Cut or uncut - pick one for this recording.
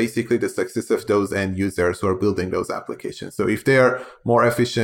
uncut